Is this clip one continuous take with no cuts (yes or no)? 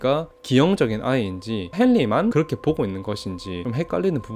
yes